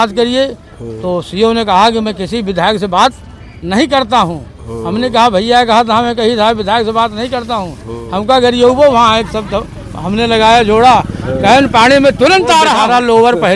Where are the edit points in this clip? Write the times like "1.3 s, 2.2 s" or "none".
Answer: 12.6 s